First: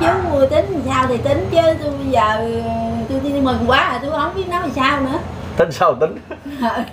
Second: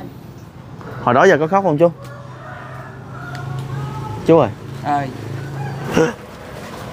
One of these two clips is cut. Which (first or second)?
second